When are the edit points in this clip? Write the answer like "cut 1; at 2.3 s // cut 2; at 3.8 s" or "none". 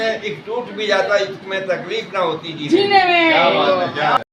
none